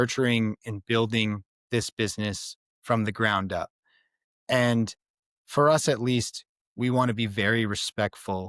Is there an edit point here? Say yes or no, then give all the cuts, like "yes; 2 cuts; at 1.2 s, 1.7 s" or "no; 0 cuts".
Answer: no; 0 cuts